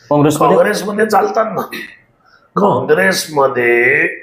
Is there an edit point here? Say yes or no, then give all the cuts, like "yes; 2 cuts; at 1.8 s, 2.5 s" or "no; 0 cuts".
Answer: no; 0 cuts